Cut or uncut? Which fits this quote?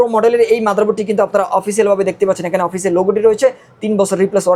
uncut